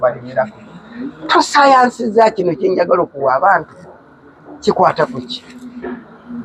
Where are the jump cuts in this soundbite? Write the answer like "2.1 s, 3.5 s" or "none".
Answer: none